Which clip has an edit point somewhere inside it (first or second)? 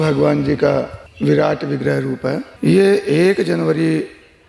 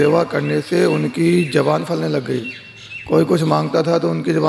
first